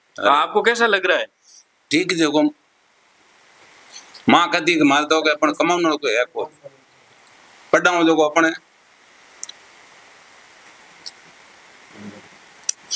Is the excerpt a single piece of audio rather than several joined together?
yes; 0 cuts

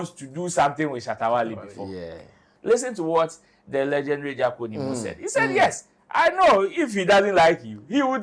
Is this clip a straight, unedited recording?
no; 1 cut; at 2.5 s

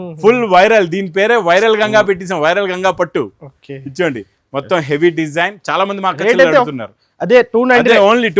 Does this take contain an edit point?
no; 0 cuts

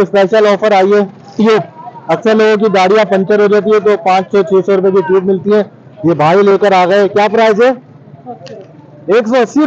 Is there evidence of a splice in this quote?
no; 0 cuts

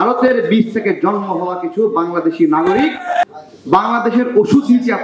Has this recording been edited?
yes; 1 cut; at 3.2 s

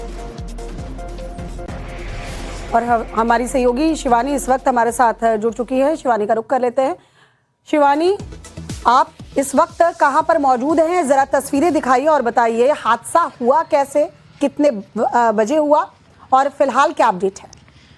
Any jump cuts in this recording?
yes; 1 cut; at 14.2 s

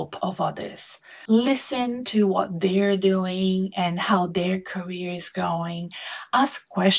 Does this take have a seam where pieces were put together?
no; 0 cuts

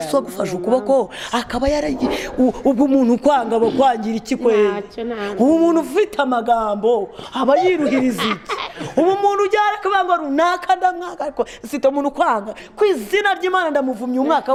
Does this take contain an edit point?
no; 0 cuts

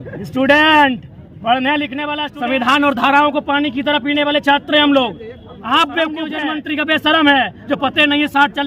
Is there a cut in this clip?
yes; 2 cuts; at 2.0 s, 6.5 s

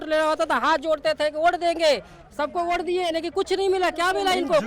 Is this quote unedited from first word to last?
yes; 0 cuts

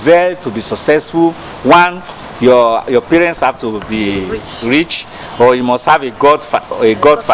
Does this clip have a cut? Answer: no; 0 cuts

